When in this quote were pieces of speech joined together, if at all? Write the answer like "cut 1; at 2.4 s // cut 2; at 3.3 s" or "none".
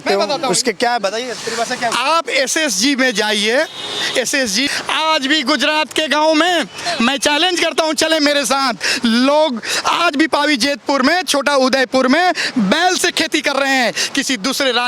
none